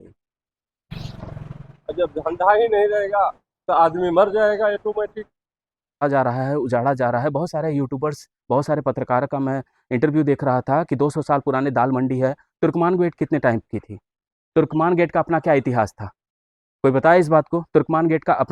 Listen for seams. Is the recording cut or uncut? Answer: cut